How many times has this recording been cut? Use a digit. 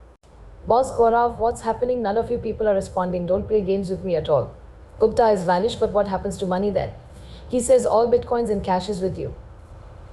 0